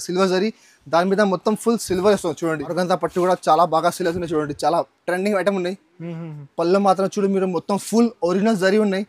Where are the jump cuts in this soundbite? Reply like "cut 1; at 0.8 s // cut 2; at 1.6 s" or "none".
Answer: cut 1; at 2.6 s